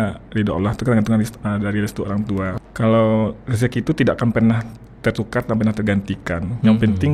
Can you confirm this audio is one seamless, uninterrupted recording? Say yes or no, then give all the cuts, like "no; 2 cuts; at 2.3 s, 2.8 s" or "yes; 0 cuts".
no; 1 cut; at 2.6 s